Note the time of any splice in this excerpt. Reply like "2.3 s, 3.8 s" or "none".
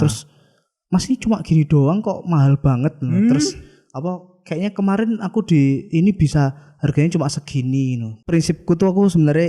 8.2 s

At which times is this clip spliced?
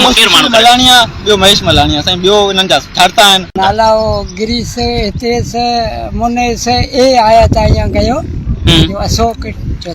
3.5 s

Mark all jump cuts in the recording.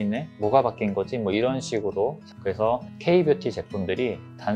2.2 s

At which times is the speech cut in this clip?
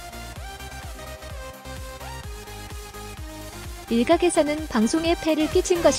3.9 s

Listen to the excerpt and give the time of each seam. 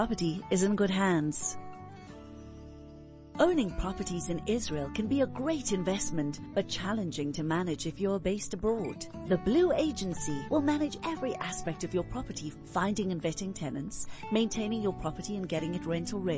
1.4 s, 3.2 s

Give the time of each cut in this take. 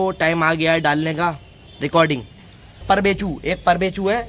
2.8 s

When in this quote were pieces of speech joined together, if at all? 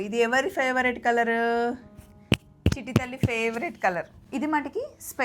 4.2 s

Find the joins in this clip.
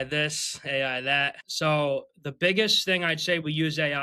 1.4 s

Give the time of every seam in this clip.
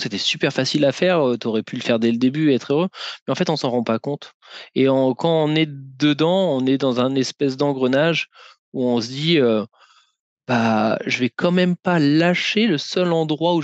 none

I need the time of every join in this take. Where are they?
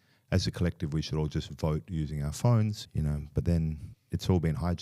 2.8 s, 3.9 s

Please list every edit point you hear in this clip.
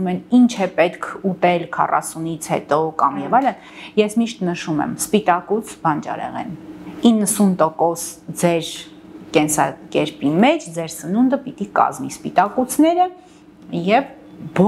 none

